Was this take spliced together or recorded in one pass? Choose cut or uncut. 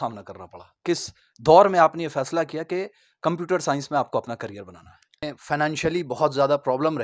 cut